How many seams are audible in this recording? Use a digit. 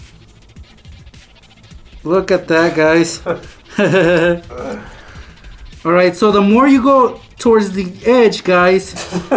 1